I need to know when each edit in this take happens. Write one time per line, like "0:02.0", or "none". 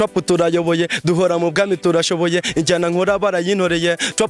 none